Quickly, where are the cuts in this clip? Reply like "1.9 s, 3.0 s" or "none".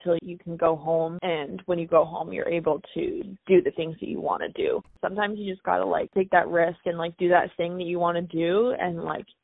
4.9 s